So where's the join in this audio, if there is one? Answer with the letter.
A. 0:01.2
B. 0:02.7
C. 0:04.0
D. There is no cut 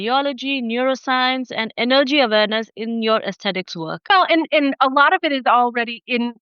C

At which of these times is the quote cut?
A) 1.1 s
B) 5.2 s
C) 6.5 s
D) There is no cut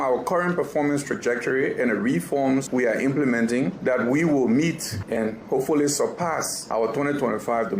B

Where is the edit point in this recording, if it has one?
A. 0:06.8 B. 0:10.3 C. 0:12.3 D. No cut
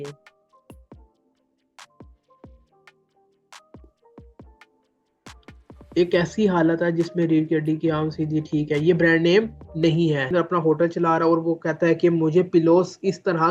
B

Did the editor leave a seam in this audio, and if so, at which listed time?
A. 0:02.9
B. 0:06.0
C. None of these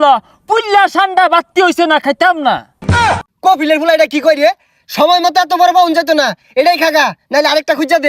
A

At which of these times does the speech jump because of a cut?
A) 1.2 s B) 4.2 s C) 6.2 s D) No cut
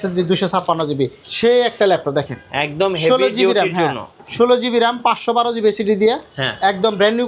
A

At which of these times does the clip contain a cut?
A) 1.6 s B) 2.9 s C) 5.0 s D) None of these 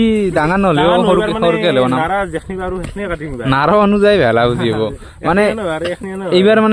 D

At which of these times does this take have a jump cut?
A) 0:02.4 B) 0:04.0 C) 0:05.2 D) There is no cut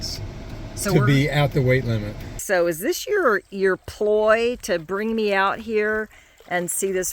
A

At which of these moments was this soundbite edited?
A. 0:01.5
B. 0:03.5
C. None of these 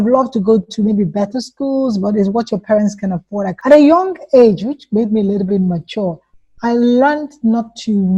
B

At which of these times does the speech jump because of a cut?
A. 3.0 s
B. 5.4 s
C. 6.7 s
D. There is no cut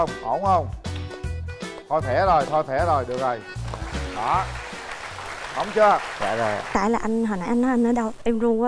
C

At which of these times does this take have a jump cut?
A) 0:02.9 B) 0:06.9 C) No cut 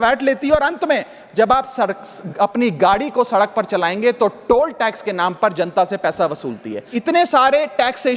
B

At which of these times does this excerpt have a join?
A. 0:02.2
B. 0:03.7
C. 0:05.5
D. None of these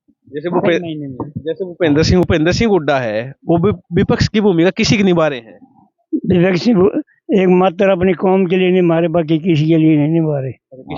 A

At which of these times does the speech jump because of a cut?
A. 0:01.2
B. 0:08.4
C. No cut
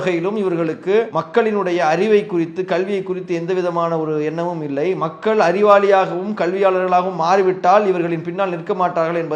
A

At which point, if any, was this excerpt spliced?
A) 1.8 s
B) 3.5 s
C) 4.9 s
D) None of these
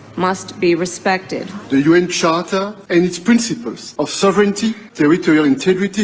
A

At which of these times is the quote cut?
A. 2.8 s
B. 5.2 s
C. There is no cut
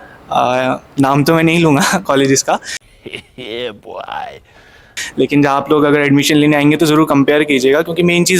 C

